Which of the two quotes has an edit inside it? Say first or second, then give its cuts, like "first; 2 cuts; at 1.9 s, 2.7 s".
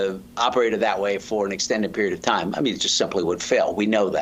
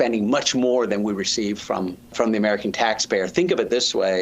second; 1 cut; at 2.1 s